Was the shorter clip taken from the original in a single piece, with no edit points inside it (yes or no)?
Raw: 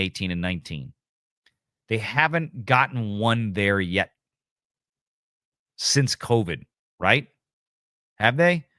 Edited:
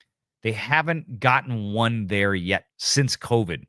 no